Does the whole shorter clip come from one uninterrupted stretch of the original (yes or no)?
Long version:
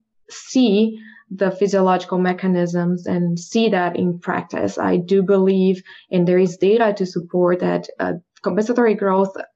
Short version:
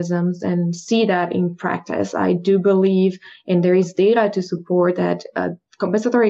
yes